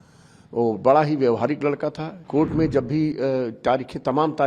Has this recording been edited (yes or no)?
yes